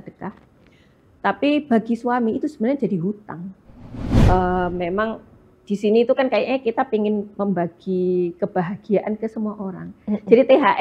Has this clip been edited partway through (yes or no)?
yes